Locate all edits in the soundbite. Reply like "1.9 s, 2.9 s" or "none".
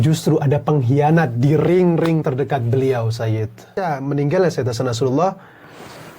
3.7 s